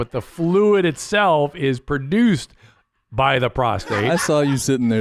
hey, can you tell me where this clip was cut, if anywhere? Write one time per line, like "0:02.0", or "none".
none